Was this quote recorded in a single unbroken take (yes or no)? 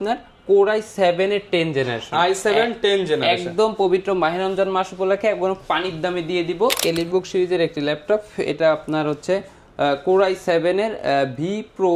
no